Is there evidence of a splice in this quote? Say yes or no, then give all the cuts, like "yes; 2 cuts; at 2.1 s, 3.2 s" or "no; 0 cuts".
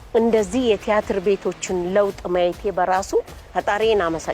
yes; 1 cut; at 3.4 s